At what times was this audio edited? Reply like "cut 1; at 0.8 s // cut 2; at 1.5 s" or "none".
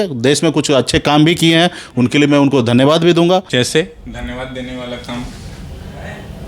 cut 1; at 3.5 s